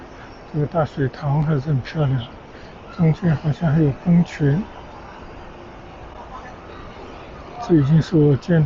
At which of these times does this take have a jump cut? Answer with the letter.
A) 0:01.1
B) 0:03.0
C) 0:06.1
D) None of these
D